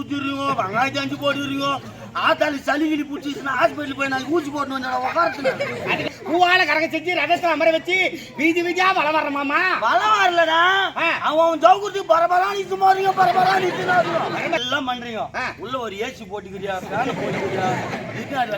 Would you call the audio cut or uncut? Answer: cut